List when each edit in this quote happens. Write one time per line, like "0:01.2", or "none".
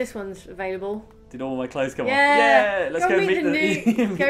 none